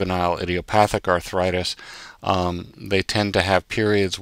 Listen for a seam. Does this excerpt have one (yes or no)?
no